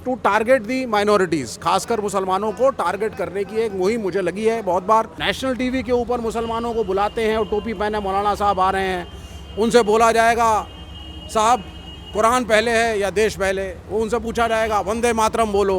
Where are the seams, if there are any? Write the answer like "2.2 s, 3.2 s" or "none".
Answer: 5.2 s